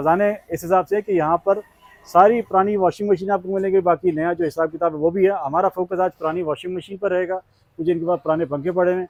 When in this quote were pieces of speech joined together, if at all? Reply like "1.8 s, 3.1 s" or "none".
none